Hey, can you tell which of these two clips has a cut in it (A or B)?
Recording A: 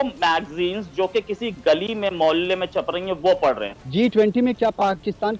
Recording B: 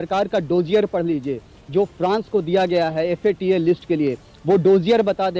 A